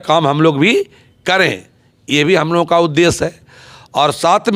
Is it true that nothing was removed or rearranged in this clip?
yes; 0 cuts

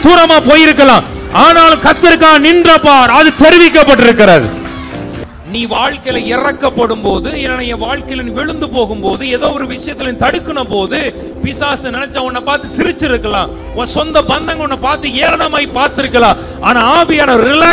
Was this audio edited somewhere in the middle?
yes; 1 cut; at 5.1 s

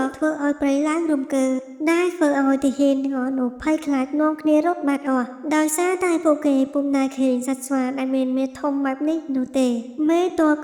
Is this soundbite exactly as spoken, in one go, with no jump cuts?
yes; 0 cuts

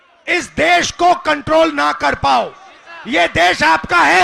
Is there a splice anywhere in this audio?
no; 0 cuts

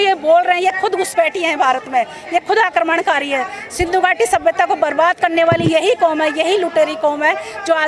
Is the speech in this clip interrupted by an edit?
no; 0 cuts

